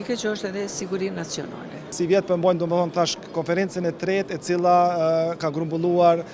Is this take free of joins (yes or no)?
no